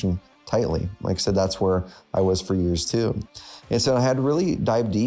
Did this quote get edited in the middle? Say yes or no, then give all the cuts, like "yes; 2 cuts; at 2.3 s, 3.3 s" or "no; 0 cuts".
no; 0 cuts